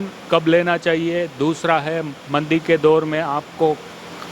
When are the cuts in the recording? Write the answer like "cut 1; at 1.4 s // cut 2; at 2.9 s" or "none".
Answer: none